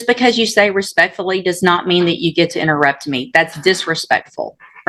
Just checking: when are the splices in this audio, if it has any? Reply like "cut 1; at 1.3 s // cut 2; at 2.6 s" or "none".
none